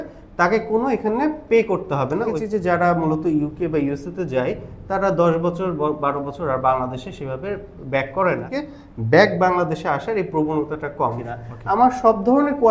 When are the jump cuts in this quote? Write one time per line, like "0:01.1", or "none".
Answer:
0:02.3
0:08.4
0:11.2